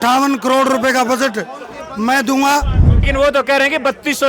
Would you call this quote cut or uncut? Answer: cut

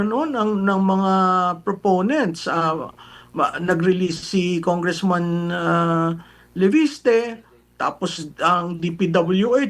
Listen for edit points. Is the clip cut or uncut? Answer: uncut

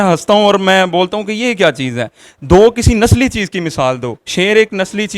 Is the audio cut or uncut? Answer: uncut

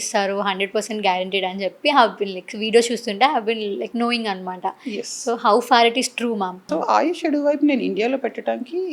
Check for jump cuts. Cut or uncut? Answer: cut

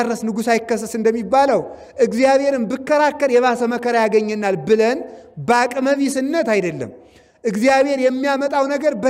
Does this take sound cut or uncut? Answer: uncut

